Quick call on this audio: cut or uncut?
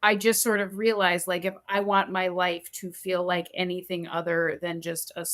uncut